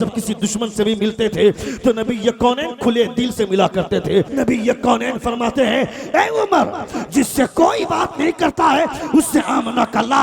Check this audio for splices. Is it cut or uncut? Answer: cut